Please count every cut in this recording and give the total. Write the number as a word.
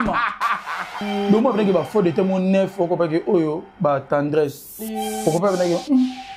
one